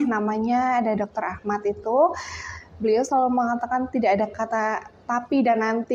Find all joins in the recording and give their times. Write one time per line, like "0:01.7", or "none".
none